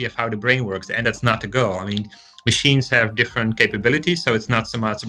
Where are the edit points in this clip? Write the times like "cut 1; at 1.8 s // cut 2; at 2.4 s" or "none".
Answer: cut 1; at 1.0 s